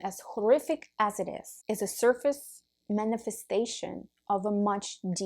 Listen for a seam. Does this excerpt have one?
yes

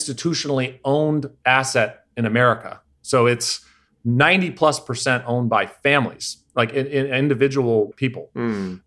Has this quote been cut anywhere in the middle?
yes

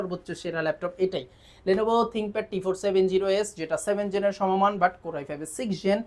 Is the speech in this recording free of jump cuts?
yes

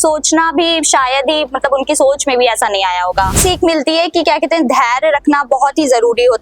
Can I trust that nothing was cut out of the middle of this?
no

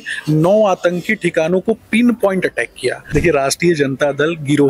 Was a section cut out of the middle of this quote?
yes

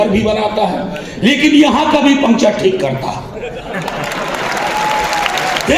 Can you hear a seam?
no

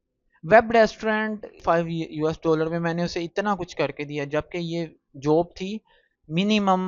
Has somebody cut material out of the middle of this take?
yes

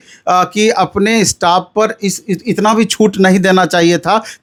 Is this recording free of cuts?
yes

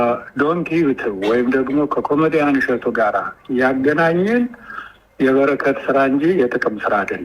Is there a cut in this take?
no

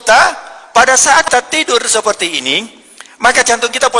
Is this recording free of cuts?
no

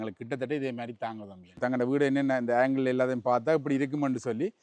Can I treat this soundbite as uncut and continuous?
no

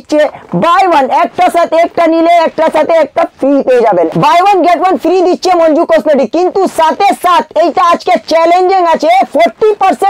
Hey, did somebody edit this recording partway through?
yes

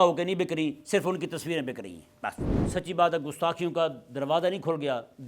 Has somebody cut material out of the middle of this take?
yes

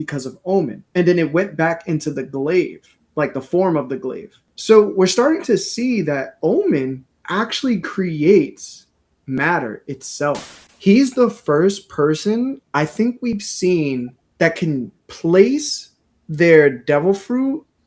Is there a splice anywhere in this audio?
yes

